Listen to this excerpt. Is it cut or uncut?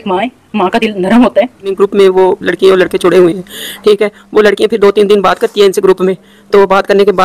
cut